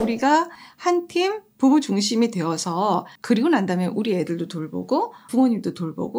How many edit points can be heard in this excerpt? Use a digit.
1